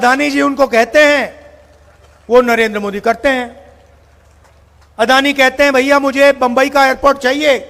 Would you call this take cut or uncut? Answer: uncut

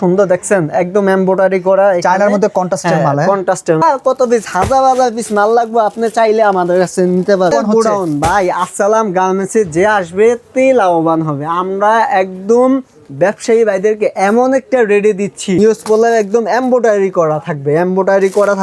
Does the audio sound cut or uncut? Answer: cut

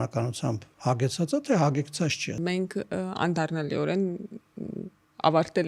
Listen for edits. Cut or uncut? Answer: cut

